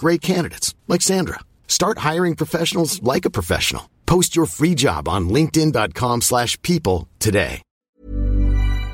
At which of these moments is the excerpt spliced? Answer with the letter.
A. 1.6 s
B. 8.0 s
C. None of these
B